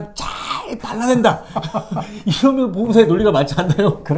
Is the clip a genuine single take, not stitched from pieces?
yes; 0 cuts

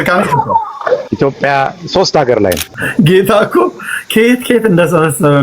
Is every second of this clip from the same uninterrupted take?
no; 2 cuts; at 1.1 s, 2.7 s

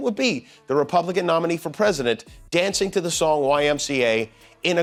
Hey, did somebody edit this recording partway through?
no; 0 cuts

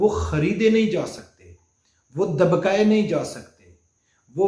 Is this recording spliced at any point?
no; 0 cuts

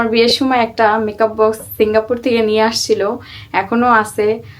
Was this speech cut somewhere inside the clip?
no; 0 cuts

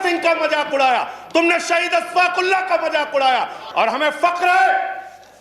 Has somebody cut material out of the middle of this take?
yes; 1 cut; at 3.6 s

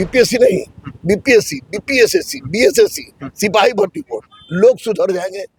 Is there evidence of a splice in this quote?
no; 0 cuts

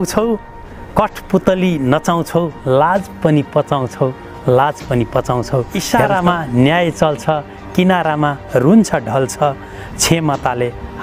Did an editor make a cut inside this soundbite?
yes; 1 cut; at 5.8 s

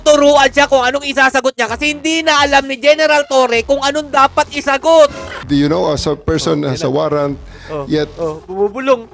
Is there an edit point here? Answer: yes; 1 cut; at 5.4 s

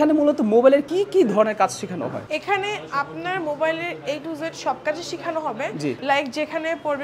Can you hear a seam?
no; 0 cuts

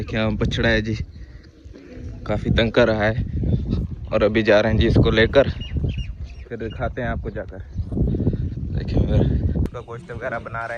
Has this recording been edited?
yes; 1 cut; at 9.6 s

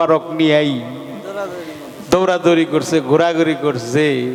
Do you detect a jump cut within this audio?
no; 0 cuts

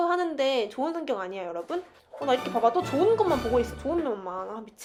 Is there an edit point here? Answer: no; 0 cuts

